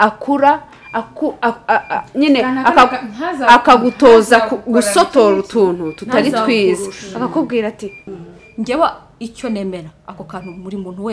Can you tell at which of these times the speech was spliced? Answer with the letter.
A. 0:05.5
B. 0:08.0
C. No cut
B